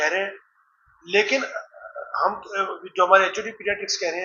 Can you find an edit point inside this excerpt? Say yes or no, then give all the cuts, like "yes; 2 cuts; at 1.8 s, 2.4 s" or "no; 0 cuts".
no; 0 cuts